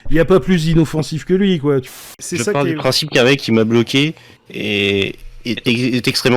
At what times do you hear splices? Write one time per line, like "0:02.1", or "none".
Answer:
0:01.9